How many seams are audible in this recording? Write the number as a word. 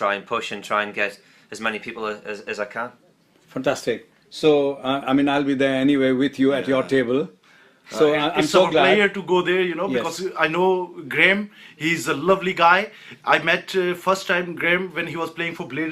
one